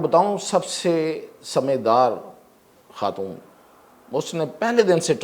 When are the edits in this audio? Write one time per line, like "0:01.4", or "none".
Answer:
none